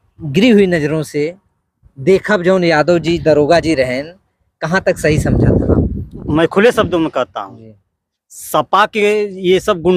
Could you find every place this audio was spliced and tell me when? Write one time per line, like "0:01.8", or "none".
0:06.3